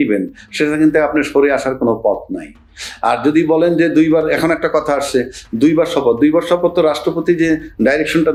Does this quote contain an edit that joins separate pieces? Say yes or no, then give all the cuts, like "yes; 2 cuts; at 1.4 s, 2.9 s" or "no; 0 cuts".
no; 0 cuts